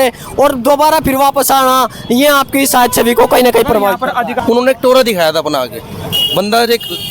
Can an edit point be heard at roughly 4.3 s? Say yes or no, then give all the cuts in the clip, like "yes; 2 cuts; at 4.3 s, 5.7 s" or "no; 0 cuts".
yes; 1 cut; at 4.3 s